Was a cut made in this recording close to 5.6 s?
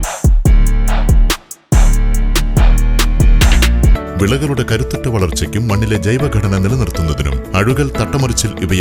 no; 1 cut; at 4.0 s

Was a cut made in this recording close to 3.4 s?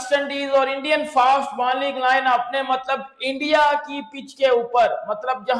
no; 0 cuts

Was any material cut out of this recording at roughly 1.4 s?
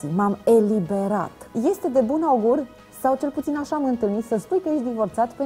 yes; 1 cut; at 1.4 s

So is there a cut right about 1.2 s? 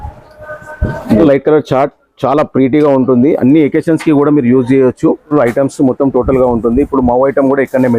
yes; 2 cuts; at 1.2 s, 5.3 s

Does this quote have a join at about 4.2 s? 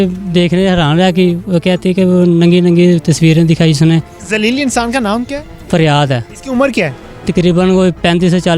yes; 1 cut; at 4.2 s

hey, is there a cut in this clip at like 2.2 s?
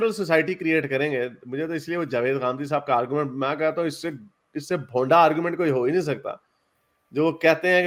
no; 0 cuts

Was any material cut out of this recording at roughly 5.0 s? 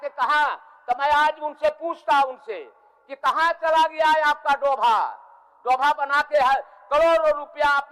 no; 0 cuts

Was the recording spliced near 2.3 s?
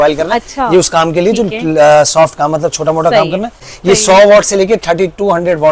no; 1 cut; at 3.7 s

